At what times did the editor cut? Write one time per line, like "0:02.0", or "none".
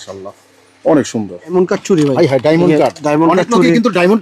0:01.5